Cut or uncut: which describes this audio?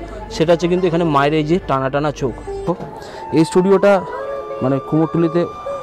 cut